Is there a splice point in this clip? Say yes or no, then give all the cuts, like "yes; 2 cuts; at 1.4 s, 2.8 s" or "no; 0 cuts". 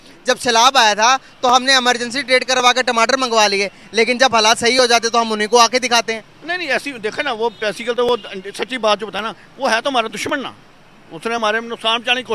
no; 0 cuts